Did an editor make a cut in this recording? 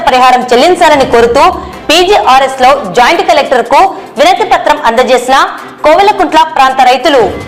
no; 0 cuts

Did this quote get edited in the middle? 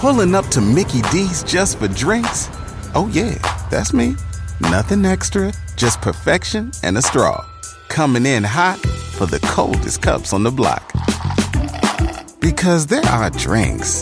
no; 0 cuts

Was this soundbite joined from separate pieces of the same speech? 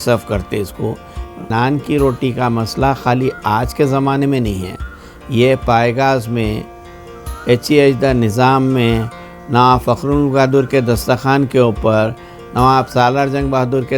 yes; 1 cut; at 1.5 s

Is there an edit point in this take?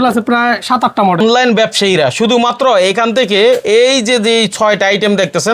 yes; 1 cut; at 1.2 s

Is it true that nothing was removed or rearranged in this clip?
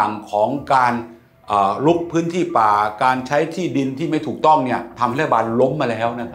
yes; 0 cuts

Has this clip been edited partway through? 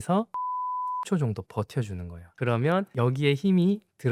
no; 0 cuts

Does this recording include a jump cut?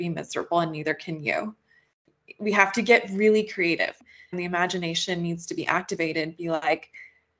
yes; 1 cut; at 4.0 s

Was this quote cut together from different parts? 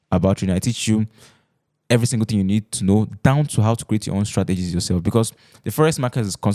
no; 0 cuts

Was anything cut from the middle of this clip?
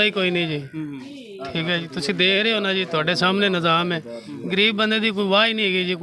no; 0 cuts

